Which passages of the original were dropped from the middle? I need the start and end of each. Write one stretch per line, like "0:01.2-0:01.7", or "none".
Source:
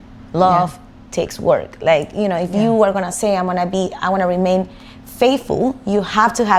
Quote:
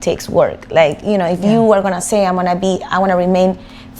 none